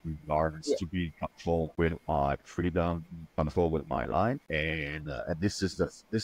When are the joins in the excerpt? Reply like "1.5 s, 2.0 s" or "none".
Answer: 1.7 s, 4.4 s